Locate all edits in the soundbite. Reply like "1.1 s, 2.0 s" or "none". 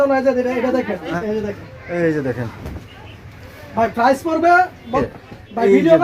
1.2 s, 4.9 s